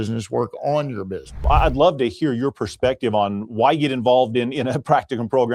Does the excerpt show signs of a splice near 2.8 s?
no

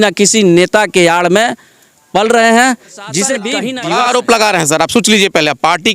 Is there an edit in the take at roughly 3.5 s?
yes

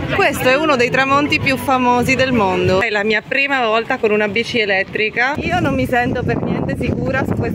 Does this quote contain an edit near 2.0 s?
no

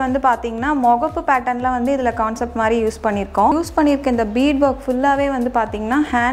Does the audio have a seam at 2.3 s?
no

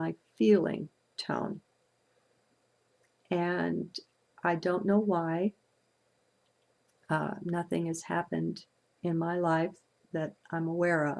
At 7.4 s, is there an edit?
yes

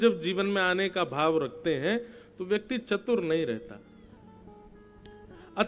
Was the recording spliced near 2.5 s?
no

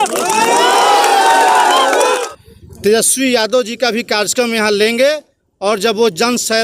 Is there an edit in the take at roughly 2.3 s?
yes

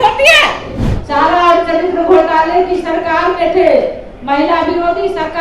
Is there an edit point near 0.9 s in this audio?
yes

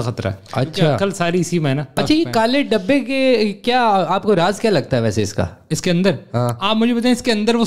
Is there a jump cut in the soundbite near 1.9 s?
yes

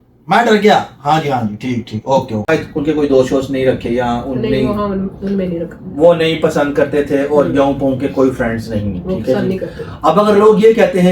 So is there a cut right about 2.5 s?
yes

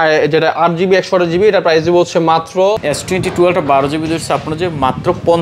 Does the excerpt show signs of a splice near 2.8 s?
yes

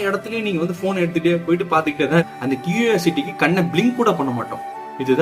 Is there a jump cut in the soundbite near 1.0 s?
no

